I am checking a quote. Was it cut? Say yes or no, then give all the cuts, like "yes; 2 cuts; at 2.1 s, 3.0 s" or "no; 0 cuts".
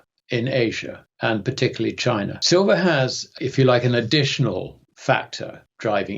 yes; 2 cuts; at 2.4 s, 3.3 s